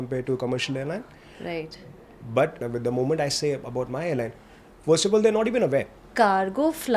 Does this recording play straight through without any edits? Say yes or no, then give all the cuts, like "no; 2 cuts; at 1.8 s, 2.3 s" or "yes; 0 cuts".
no; 2 cuts; at 2.6 s, 6.1 s